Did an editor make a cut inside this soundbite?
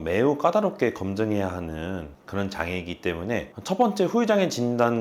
no; 0 cuts

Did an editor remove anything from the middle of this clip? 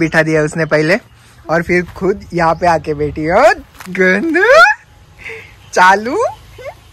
no; 0 cuts

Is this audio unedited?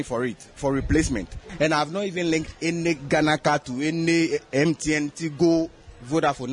no; 1 cut; at 1.4 s

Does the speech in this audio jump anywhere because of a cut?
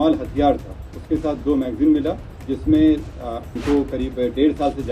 yes; 1 cut; at 3.5 s

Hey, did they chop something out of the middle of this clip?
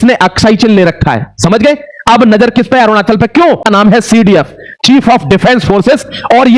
yes; 1 cut; at 3.7 s

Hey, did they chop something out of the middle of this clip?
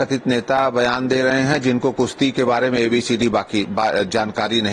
no; 0 cuts

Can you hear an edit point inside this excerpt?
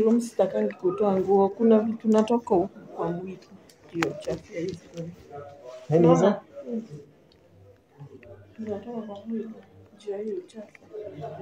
no; 0 cuts

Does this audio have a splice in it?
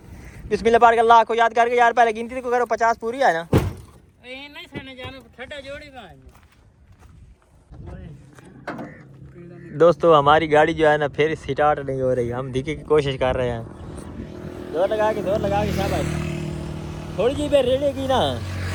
no; 0 cuts

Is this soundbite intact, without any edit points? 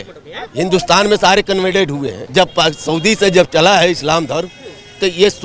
no; 1 cut; at 2.2 s

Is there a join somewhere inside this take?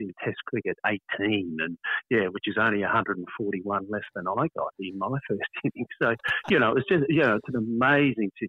no; 0 cuts

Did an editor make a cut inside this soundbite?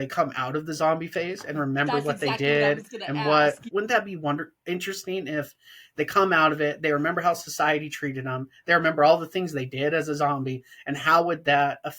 yes; 1 cut; at 3.7 s

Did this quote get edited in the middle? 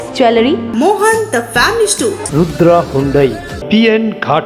yes; 1 cut; at 3.5 s

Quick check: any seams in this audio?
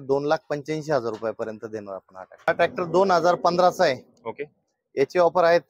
yes; 1 cut; at 2.5 s

